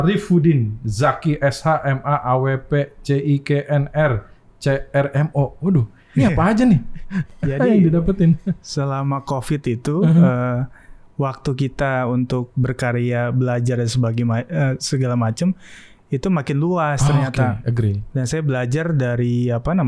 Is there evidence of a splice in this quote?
no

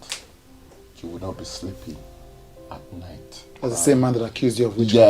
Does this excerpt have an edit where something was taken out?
yes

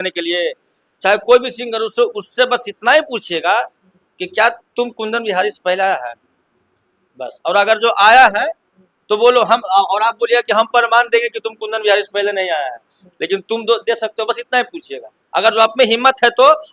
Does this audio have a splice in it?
no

